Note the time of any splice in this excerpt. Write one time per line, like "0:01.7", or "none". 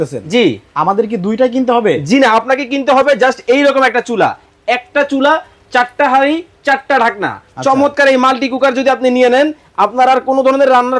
none